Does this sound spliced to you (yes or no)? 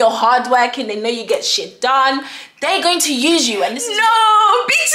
yes